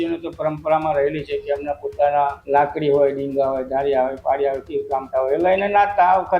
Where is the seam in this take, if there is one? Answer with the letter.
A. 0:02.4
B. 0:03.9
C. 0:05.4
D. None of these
A